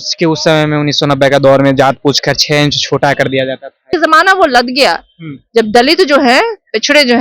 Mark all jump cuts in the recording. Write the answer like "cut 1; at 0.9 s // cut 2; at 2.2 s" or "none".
cut 1; at 3.9 s